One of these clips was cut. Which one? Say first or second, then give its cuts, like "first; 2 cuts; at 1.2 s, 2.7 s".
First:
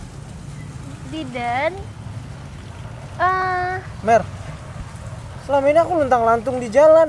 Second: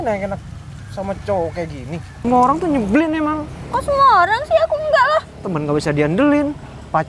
second; 1 cut; at 2.1 s